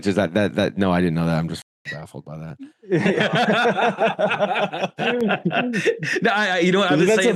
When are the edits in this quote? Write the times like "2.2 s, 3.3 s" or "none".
none